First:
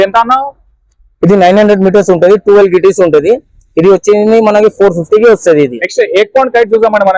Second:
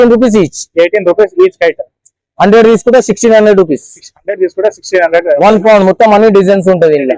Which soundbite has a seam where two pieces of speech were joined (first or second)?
first